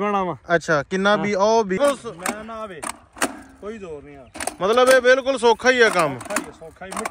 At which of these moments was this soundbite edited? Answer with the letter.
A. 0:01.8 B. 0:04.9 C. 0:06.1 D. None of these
A